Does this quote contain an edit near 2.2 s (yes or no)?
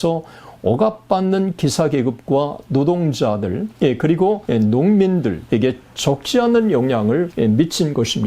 no